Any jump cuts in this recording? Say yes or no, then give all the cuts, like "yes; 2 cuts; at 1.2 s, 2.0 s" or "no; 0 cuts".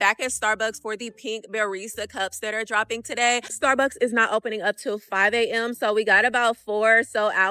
no; 0 cuts